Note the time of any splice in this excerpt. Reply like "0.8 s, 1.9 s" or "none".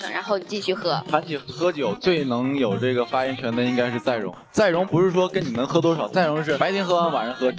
1.5 s, 6.6 s